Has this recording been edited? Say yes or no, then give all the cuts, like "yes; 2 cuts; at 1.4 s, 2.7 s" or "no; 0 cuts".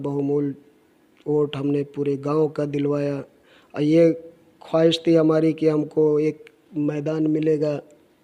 no; 0 cuts